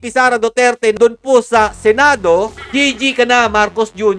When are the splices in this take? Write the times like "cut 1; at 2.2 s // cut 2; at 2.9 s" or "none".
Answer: cut 1; at 0.9 s // cut 2; at 2.6 s